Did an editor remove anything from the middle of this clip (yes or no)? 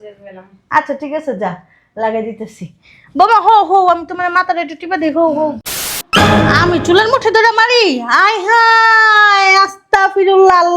yes